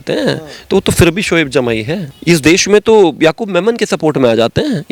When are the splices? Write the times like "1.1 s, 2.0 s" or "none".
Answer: none